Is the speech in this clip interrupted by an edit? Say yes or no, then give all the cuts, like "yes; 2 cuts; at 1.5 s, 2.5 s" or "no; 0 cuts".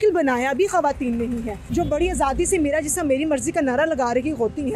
yes; 1 cut; at 1.6 s